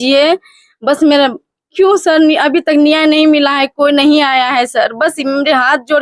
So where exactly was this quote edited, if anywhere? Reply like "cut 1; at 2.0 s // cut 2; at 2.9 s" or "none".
none